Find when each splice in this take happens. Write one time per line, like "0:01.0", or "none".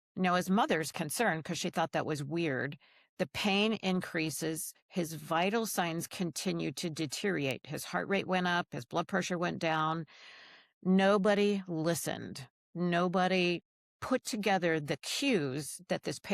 none